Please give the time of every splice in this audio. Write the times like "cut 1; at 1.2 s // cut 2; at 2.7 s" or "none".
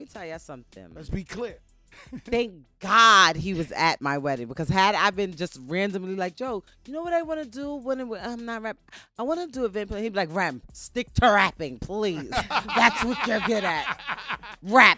none